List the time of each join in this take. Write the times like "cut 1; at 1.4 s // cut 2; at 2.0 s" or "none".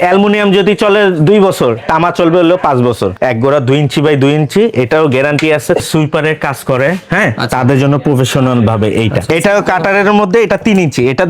cut 1; at 3.1 s // cut 2; at 5.8 s // cut 3; at 9.3 s